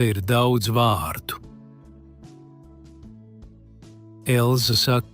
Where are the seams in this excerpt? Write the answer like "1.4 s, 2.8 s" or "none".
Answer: 1.4 s, 4.2 s